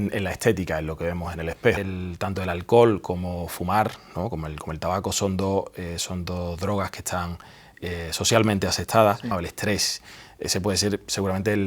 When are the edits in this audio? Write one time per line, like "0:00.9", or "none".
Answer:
0:01.9
0:09.4